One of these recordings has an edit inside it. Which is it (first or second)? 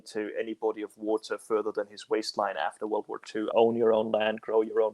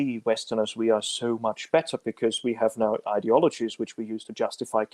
first